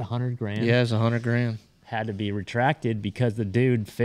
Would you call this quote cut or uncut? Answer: uncut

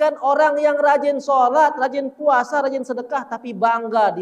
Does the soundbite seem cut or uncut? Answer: uncut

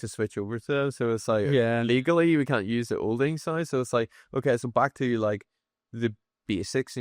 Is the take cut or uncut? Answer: uncut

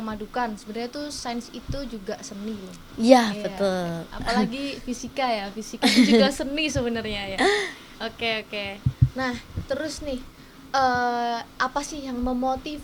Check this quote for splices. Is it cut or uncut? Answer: uncut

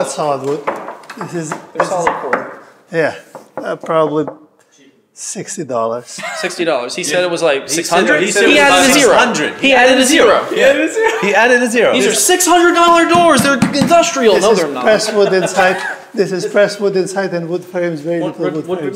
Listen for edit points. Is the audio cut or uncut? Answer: uncut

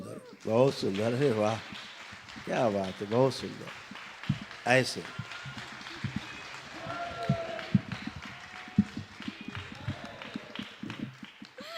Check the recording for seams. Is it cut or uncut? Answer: uncut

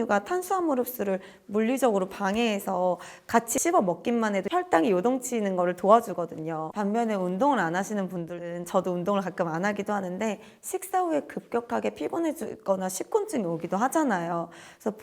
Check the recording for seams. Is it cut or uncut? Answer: cut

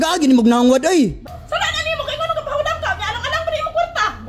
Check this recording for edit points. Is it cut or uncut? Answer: cut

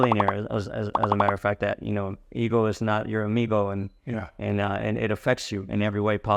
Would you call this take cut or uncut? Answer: uncut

